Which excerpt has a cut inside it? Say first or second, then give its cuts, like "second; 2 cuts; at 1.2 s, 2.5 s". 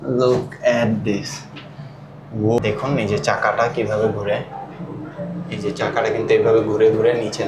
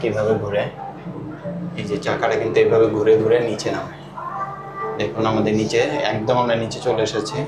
first; 1 cut; at 2.6 s